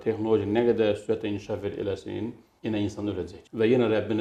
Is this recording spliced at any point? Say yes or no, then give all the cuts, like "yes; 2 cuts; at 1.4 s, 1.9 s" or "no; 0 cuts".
no; 0 cuts